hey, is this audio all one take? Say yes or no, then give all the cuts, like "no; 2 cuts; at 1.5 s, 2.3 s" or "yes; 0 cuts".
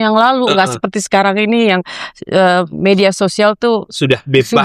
yes; 0 cuts